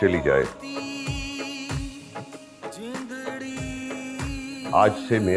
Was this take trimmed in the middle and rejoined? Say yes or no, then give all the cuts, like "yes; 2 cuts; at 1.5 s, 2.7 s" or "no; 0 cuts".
no; 0 cuts